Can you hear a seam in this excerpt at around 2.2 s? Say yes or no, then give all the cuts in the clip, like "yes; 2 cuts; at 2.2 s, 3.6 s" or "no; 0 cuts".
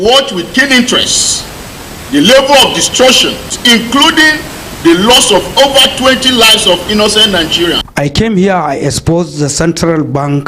no; 2 cuts; at 3.5 s, 7.9 s